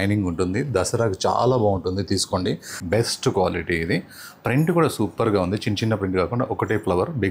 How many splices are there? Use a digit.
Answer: 1